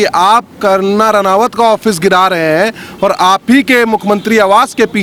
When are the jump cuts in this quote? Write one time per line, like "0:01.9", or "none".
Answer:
none